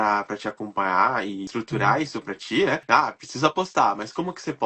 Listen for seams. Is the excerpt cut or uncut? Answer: cut